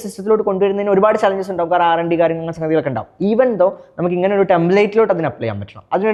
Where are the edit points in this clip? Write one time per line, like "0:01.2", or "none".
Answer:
none